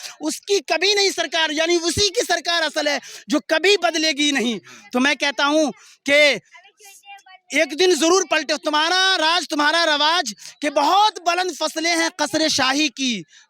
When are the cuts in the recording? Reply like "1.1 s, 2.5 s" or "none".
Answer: none